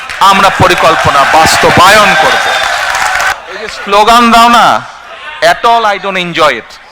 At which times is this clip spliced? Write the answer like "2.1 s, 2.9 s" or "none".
3.3 s